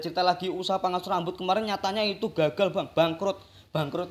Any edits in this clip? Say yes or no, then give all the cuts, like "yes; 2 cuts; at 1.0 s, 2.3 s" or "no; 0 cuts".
no; 0 cuts